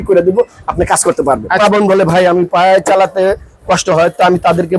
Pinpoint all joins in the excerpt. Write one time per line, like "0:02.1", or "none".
0:01.6